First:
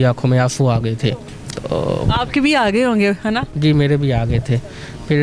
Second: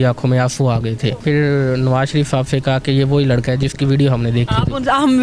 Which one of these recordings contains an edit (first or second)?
second